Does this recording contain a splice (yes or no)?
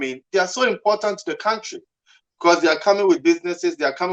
no